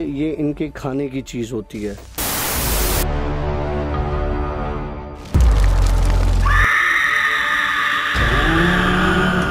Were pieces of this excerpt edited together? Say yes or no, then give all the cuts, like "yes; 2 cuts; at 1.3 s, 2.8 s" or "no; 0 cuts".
no; 0 cuts